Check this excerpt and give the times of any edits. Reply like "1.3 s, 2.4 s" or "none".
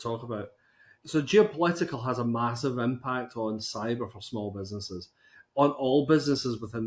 0.9 s